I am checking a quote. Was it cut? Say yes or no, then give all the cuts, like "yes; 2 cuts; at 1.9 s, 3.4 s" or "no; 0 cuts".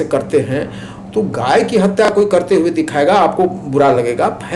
no; 0 cuts